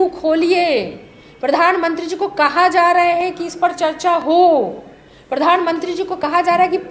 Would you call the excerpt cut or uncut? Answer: uncut